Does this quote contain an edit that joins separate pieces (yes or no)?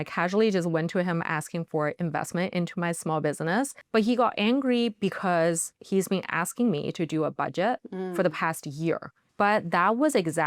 yes